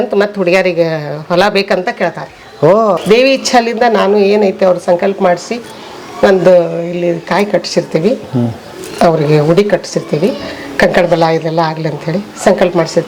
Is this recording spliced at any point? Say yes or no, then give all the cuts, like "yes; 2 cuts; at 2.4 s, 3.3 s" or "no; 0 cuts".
yes; 1 cut; at 3.0 s